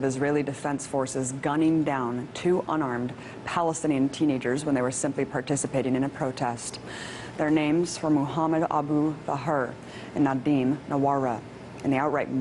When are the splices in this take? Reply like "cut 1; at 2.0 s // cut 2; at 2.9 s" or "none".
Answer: none